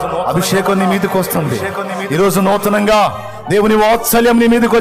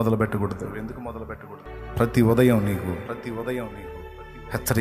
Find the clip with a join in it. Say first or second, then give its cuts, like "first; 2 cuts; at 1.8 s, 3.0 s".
second; 1 cut; at 1.7 s